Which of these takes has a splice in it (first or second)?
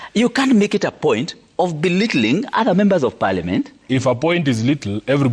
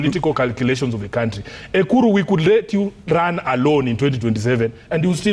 first